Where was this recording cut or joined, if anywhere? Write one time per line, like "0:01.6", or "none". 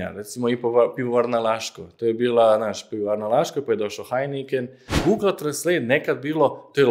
0:04.9